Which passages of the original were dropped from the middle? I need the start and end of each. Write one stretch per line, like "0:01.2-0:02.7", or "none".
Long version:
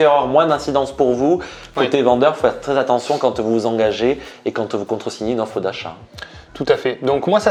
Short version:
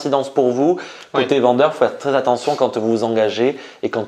none